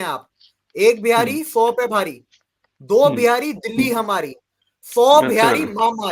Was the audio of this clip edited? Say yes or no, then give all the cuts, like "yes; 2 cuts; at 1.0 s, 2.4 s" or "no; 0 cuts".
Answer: no; 0 cuts